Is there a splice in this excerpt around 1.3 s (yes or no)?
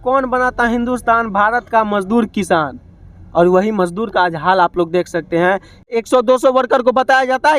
no